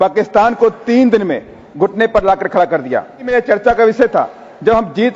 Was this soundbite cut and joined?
yes; 1 cut; at 3.3 s

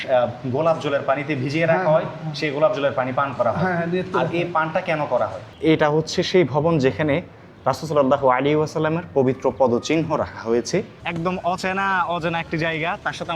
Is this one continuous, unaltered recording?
no; 2 cuts; at 5.5 s, 11.0 s

